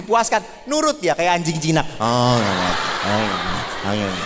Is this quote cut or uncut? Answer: uncut